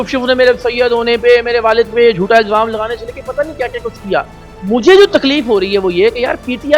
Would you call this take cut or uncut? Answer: uncut